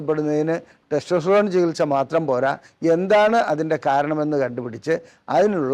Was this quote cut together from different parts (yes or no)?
no